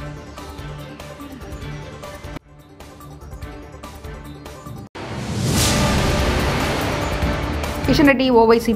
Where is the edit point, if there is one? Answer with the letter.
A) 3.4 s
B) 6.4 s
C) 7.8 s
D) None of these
C